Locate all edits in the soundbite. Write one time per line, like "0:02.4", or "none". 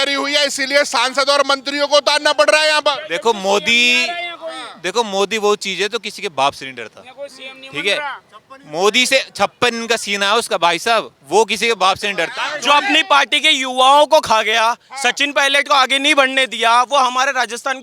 0:12.3